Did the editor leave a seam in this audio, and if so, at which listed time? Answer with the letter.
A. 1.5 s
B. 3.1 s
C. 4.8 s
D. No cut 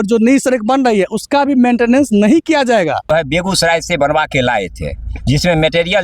B